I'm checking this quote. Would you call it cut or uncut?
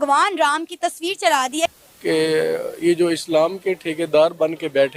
uncut